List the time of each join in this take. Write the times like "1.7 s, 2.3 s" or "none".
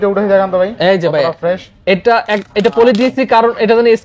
none